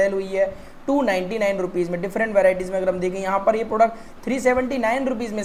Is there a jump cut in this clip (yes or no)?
no